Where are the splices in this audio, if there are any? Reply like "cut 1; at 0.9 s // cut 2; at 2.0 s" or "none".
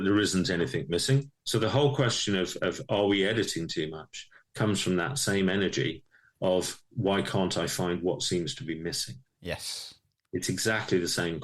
cut 1; at 1.4 s